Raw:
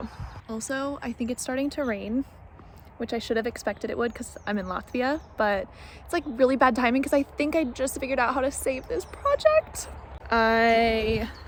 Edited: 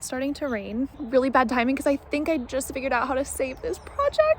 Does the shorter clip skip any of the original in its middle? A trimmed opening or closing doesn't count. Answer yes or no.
yes